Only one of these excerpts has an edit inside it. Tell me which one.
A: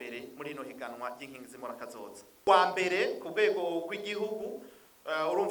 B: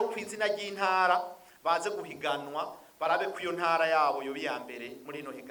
A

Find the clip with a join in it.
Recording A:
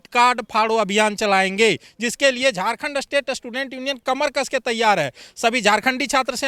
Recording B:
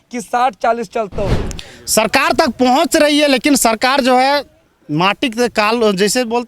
B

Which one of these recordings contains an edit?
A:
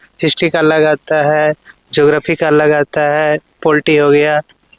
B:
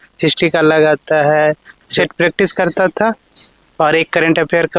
B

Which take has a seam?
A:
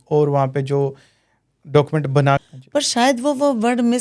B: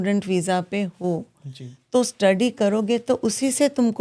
A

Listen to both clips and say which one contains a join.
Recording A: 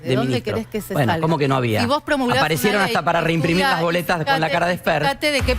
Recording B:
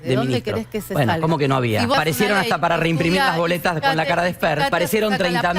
B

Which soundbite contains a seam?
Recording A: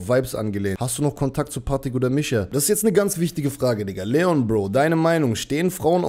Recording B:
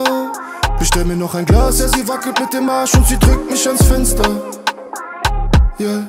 A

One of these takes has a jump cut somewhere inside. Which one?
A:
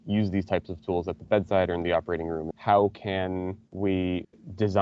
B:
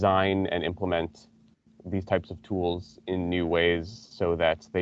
A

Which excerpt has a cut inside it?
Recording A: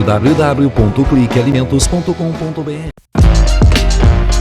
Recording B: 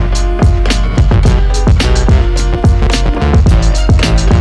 A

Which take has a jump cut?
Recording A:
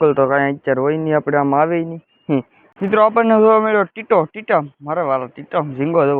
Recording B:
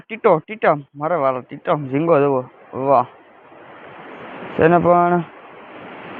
A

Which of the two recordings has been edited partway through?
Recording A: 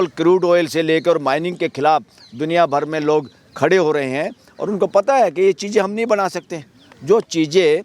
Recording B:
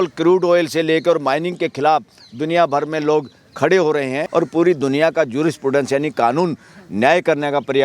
B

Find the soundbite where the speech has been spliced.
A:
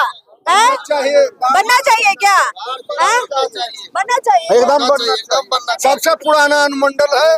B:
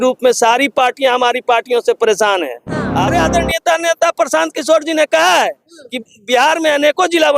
B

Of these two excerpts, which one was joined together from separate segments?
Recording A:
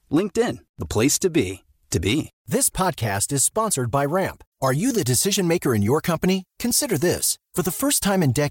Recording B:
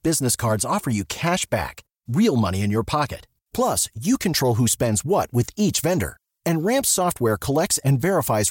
A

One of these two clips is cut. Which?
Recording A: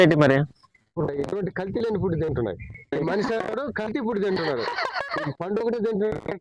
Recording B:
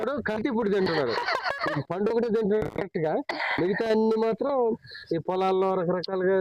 A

